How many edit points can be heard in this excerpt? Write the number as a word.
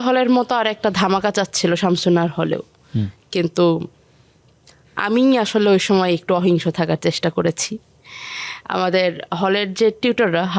zero